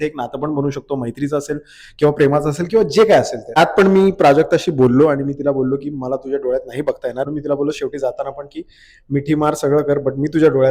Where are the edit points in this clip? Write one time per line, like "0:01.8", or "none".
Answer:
0:03.6
0:07.3

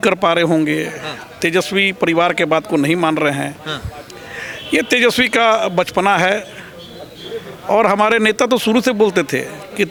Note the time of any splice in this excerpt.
none

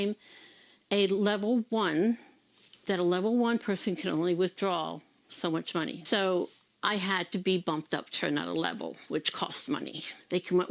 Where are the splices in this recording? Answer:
none

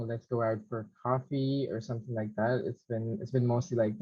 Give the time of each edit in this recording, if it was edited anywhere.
none

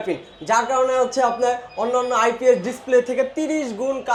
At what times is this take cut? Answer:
none

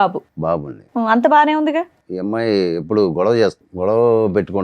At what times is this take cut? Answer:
0:02.0
0:03.6

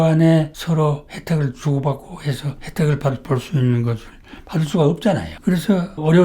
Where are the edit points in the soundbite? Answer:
0:05.3

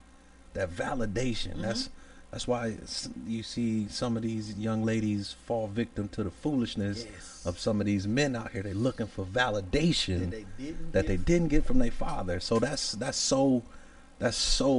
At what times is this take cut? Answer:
none

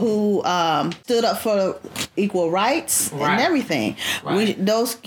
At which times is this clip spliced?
0:01.0

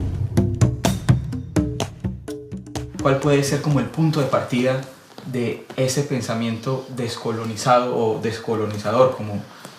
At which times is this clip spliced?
0:06.0

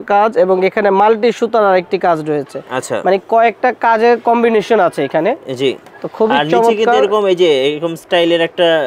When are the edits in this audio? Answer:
none

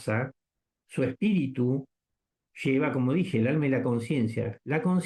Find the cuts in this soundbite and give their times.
none

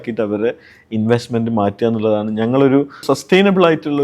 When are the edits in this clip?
0:03.0

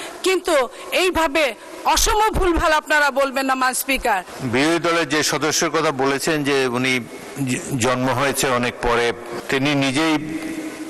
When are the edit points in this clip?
0:04.3
0:07.2
0:09.3

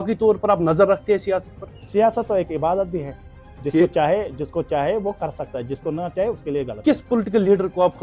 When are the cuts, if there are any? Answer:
none

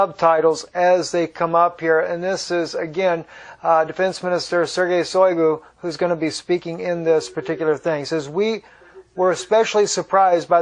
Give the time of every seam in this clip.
0:06.0

